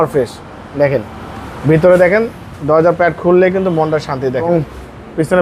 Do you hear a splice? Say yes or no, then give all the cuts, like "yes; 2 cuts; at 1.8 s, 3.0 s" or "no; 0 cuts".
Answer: yes; 1 cut; at 4.5 s